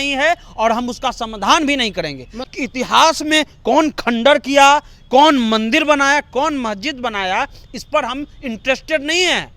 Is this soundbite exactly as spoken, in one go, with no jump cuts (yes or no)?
no